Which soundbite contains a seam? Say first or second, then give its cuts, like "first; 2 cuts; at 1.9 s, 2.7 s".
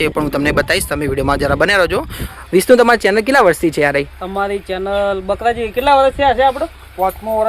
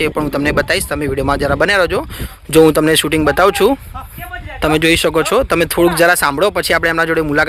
first; 1 cut; at 2.3 s